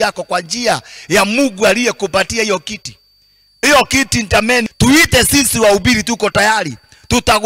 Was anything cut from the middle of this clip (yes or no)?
yes